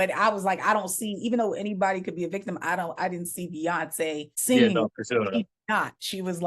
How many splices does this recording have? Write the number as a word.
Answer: one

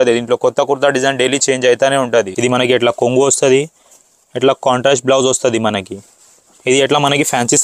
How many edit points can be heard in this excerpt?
one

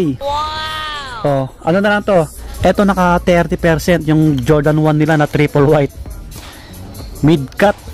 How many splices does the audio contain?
one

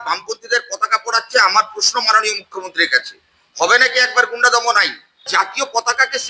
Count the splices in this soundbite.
one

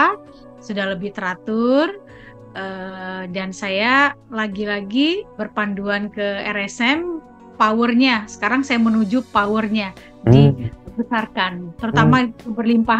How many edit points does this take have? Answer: three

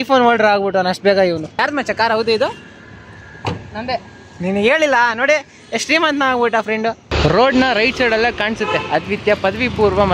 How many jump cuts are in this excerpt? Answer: two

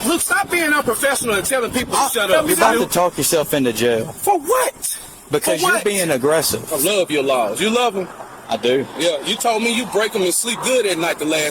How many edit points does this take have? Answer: two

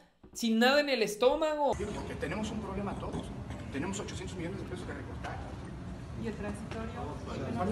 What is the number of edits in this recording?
one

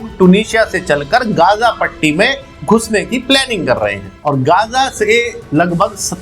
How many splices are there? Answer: one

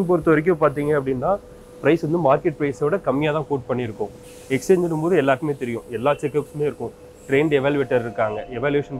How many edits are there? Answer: one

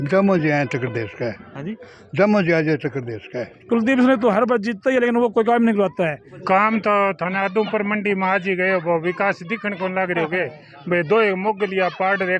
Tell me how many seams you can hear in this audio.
two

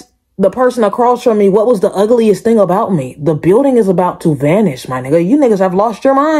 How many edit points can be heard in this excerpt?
zero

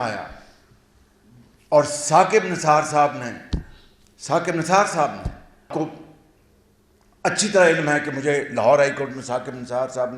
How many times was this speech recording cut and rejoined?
one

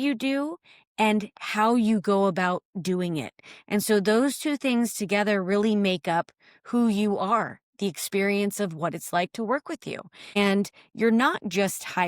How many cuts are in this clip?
one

